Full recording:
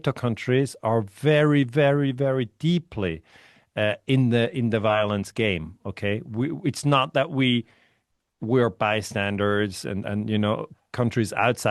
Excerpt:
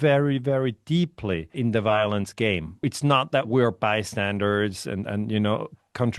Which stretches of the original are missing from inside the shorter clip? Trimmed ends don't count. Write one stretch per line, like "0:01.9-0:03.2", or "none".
0:03.3-0:04.5
0:05.8-0:07.8